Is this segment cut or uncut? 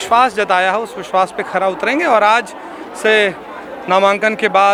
uncut